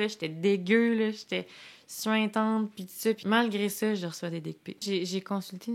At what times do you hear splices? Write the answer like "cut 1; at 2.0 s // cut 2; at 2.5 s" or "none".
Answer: cut 1; at 3.2 s // cut 2; at 4.8 s